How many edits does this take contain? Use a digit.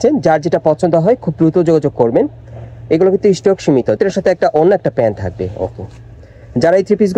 1